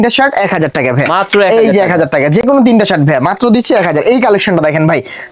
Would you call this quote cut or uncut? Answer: uncut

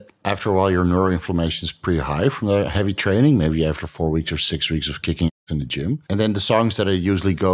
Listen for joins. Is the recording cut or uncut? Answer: cut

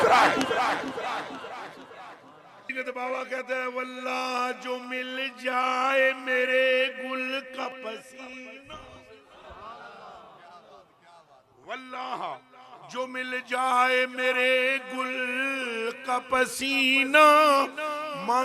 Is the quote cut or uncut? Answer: cut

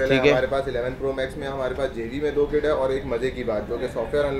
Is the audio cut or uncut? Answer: uncut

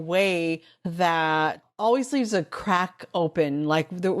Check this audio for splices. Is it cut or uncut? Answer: cut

